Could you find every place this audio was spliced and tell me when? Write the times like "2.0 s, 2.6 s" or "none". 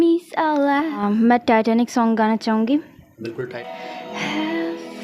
1.0 s